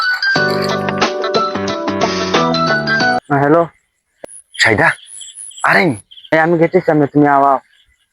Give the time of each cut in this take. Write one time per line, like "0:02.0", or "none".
none